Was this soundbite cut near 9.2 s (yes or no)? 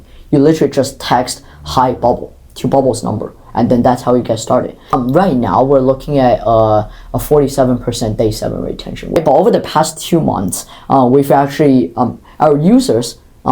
yes